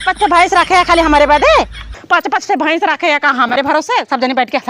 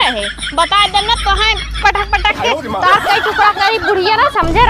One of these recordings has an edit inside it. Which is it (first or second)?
first